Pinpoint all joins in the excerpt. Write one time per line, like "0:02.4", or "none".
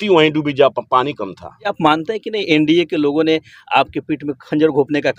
0:01.7